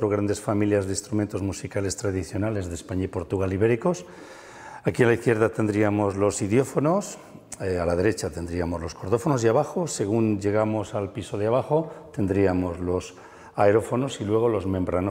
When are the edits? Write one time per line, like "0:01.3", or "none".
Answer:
none